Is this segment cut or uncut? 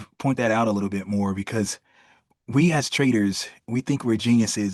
uncut